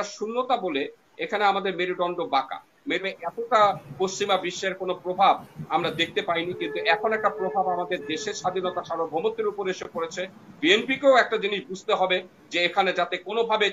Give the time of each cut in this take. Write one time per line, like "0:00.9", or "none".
0:03.0